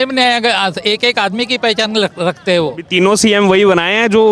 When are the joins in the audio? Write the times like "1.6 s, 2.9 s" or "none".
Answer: none